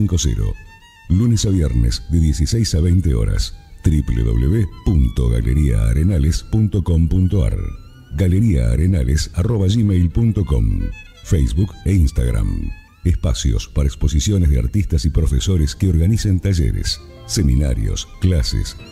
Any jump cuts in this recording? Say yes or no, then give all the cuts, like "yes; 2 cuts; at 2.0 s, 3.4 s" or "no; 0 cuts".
no; 0 cuts